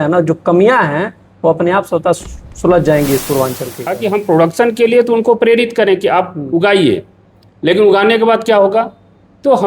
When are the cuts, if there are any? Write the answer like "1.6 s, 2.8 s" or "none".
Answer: 4.0 s